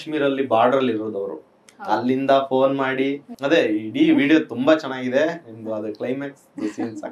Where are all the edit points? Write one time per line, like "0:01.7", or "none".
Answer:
0:03.3